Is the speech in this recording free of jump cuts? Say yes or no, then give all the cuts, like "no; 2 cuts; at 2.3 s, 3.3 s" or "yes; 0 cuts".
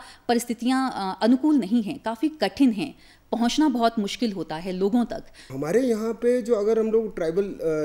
no; 1 cut; at 5.5 s